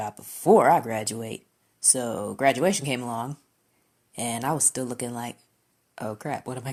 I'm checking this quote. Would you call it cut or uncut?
uncut